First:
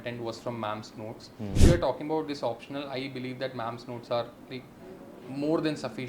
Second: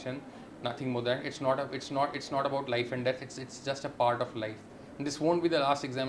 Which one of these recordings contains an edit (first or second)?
first